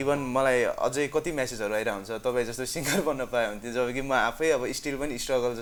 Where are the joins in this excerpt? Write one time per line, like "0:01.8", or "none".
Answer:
none